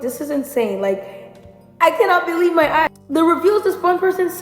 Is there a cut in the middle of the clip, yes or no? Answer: yes